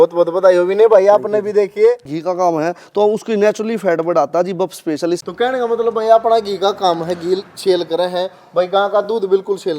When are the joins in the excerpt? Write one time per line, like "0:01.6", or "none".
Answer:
0:02.2
0:05.2